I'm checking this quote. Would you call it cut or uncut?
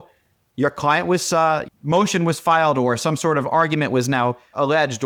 uncut